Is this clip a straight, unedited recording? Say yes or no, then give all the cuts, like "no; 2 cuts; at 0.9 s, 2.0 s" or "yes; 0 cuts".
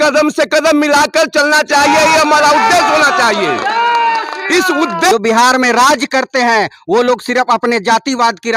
no; 1 cut; at 5.1 s